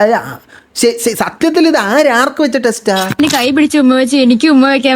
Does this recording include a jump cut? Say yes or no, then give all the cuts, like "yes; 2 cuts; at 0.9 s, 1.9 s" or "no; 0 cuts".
yes; 1 cut; at 3.2 s